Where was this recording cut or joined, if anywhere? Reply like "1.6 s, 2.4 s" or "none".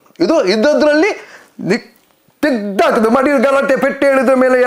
none